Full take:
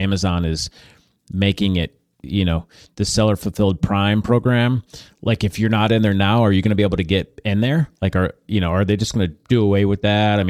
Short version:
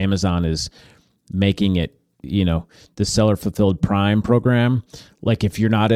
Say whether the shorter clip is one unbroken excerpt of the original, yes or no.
yes